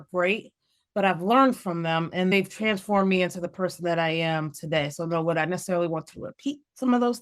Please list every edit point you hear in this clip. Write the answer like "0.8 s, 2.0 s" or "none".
2.3 s